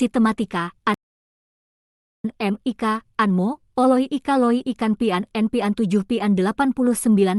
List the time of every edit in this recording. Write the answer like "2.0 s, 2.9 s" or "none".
none